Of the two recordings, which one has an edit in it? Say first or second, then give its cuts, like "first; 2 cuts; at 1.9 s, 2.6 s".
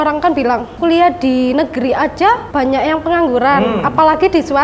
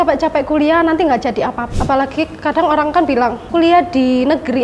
second; 1 cut; at 1.6 s